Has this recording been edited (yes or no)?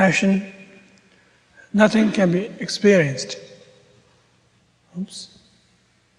yes